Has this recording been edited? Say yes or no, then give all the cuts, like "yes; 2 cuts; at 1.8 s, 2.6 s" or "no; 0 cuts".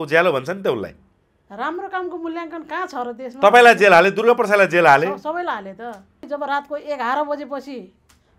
yes; 1 cut; at 6.2 s